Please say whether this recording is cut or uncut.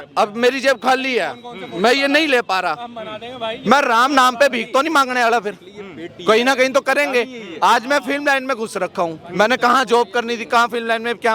uncut